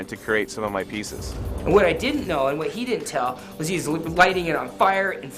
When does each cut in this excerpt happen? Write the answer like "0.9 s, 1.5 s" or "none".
1.4 s